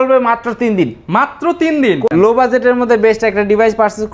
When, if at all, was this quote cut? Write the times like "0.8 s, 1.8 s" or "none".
2.1 s